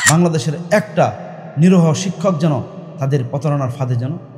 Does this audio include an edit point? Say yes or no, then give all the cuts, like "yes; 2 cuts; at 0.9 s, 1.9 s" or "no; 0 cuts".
no; 0 cuts